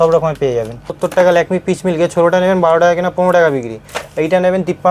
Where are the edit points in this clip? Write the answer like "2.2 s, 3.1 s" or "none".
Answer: 0.9 s